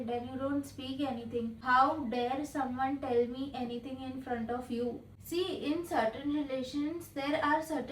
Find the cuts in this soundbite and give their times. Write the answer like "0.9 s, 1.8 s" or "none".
1.6 s, 5.1 s